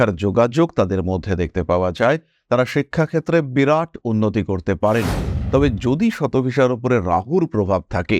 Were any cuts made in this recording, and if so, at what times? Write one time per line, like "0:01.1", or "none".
0:05.3